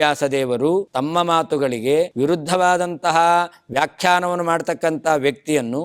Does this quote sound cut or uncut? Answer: cut